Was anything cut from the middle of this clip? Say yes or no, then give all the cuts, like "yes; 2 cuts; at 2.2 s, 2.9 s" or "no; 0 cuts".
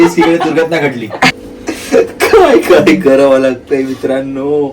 yes; 1 cut; at 1.5 s